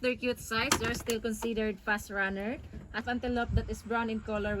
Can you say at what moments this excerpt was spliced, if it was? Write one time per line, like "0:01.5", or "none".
0:03.0